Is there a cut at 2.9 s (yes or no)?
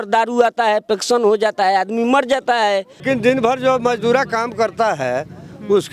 yes